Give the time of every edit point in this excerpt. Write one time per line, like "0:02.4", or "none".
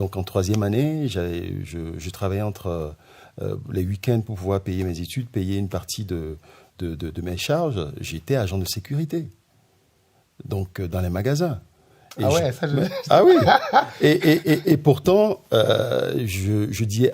none